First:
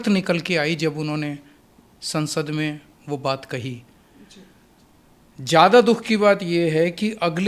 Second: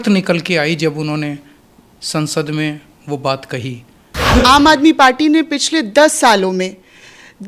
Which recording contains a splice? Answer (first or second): second